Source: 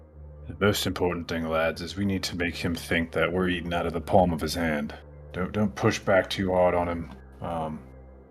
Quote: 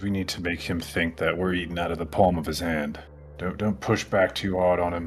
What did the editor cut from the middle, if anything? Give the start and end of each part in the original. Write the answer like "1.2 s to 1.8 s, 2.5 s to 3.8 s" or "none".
none